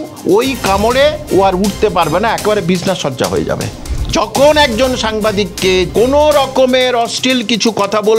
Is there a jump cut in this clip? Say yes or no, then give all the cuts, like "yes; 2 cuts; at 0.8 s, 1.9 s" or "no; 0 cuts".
yes; 2 cuts; at 3.8 s, 5.9 s